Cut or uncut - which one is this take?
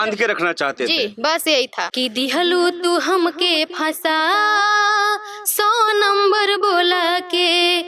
cut